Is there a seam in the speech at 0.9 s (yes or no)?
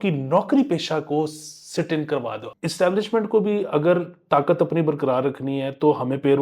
no